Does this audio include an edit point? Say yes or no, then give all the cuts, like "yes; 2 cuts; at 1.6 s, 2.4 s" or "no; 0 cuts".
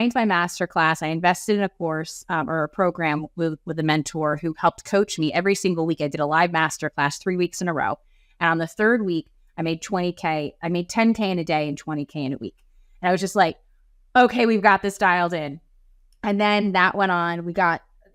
no; 0 cuts